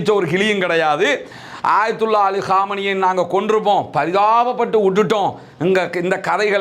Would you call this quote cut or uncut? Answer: cut